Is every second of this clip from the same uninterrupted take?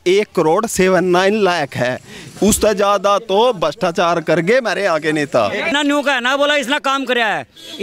no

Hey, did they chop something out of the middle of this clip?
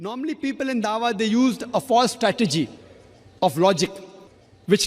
no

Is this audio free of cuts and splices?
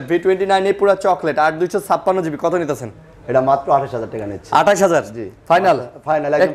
yes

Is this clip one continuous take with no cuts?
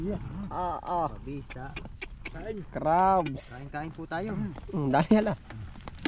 yes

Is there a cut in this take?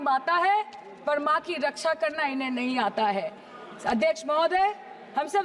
no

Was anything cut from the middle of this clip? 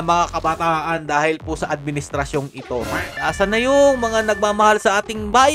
yes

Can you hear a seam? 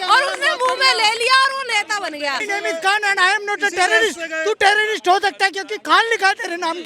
yes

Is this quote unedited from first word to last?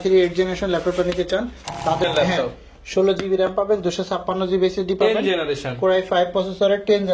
no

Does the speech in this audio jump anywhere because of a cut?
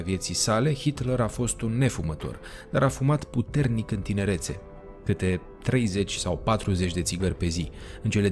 no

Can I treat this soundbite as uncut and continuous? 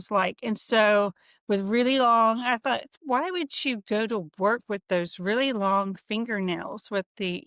no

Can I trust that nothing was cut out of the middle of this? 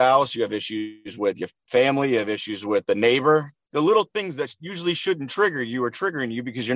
yes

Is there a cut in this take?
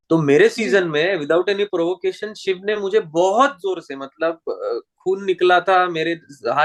no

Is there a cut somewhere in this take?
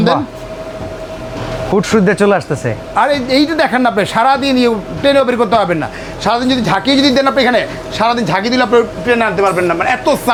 no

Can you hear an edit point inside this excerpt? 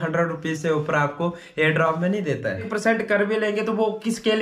yes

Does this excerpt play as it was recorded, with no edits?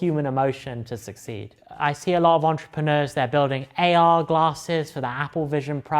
no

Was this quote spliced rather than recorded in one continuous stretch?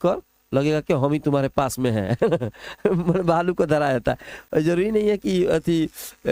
no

